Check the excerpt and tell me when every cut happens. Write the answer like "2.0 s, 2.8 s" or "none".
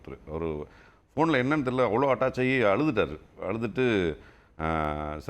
none